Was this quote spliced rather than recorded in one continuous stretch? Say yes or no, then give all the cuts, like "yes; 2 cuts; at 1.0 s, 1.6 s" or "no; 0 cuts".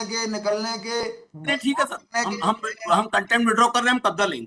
no; 0 cuts